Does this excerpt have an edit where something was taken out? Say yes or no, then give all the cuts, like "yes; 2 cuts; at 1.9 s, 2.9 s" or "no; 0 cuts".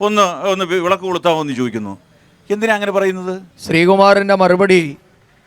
yes; 1 cut; at 3.5 s